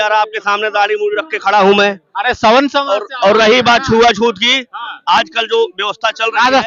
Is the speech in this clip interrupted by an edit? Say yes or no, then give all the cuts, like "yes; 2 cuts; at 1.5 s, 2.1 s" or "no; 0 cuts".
no; 0 cuts